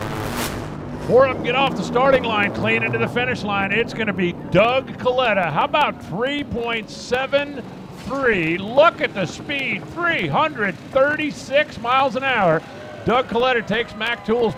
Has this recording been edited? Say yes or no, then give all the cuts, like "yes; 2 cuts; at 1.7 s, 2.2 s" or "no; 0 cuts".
no; 0 cuts